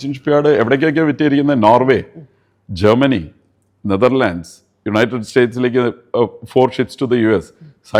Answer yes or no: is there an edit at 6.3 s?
no